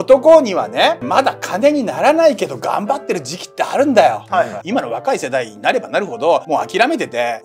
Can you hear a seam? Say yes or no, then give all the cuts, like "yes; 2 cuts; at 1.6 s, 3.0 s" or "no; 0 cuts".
yes; 1 cut; at 4.6 s